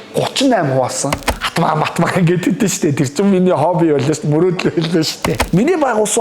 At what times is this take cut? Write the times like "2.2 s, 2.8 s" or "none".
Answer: 1.2 s, 5.4 s

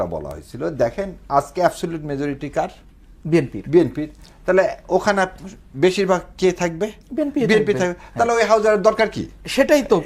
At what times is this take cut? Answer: none

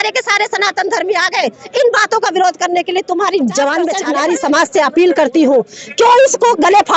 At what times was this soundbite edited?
4.0 s

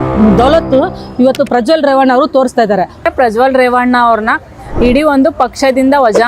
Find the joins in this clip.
3.0 s

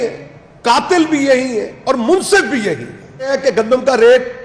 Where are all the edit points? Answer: 3.5 s

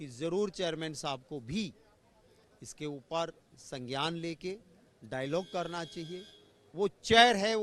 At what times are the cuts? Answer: none

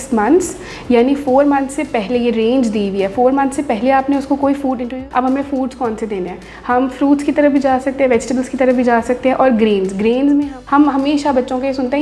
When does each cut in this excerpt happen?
4.8 s, 10.5 s

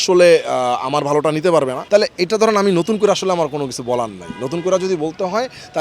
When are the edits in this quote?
1.8 s

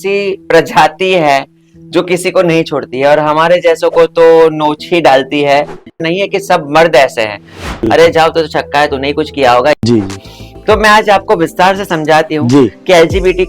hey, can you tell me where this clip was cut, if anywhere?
5.9 s, 7.9 s, 9.8 s

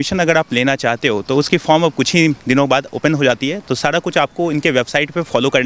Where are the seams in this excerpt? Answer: none

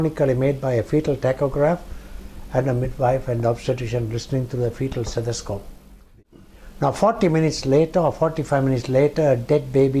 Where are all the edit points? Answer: 6.2 s

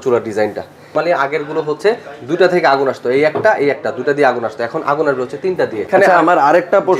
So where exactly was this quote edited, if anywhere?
0.9 s, 5.9 s

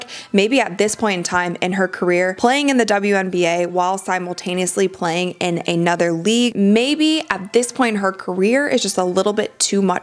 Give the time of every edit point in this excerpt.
2.3 s, 6.5 s

